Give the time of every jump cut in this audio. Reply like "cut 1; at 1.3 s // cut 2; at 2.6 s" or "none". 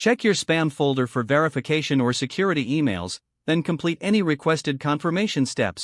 none